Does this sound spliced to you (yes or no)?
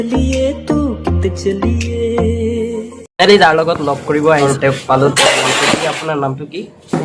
yes